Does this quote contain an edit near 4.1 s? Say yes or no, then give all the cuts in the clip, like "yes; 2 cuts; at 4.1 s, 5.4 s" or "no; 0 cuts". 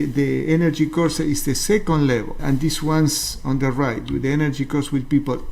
no; 1 cut; at 2.4 s